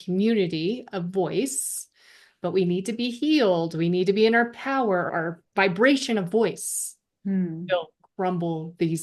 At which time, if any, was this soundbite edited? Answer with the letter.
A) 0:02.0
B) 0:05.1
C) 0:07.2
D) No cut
B